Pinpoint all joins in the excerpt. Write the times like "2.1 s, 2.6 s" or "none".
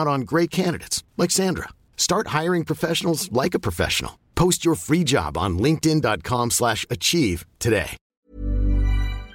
8.2 s